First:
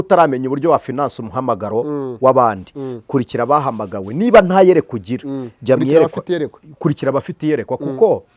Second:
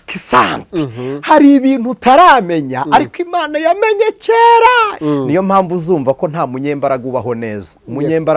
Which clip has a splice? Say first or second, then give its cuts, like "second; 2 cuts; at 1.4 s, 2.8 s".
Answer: second; 1 cut; at 4.9 s